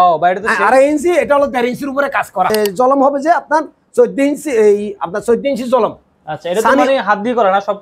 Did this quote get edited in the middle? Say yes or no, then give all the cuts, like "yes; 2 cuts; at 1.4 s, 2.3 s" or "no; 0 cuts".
yes; 1 cut; at 2.7 s